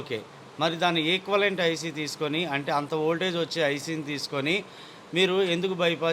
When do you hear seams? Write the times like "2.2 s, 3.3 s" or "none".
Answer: none